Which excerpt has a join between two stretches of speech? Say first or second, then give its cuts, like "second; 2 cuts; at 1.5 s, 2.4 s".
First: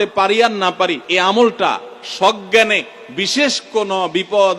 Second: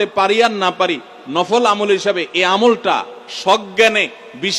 first; 1 cut; at 1.0 s